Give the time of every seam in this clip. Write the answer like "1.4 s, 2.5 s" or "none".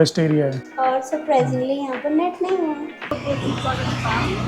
3.1 s